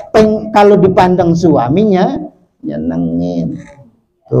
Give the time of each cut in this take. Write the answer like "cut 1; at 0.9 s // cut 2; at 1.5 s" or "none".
none